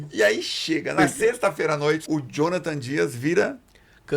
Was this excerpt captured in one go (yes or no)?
no